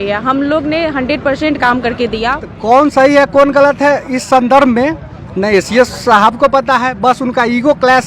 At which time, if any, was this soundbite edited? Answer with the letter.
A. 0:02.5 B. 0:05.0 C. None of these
A